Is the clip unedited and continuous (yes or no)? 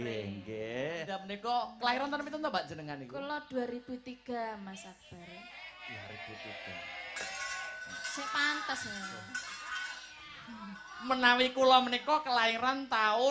no